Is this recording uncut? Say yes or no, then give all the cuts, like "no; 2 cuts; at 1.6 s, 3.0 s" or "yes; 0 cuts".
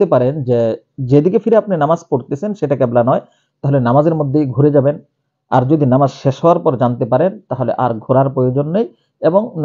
yes; 0 cuts